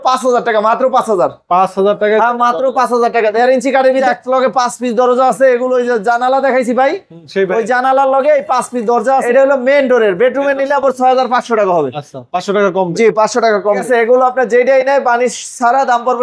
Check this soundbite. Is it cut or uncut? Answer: cut